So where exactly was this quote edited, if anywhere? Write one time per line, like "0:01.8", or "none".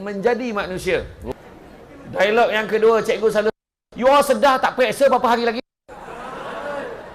0:01.3